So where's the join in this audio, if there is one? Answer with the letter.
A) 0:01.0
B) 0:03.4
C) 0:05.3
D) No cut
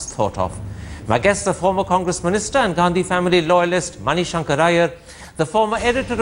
D